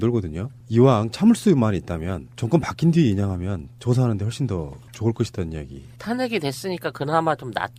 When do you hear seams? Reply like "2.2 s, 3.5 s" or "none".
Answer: none